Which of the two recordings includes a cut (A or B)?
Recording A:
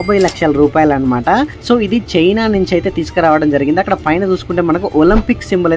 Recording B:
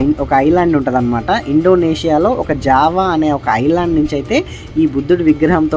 A